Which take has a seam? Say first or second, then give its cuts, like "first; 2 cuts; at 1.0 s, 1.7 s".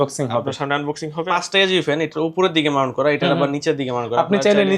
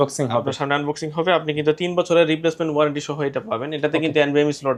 first; 1 cut; at 1.2 s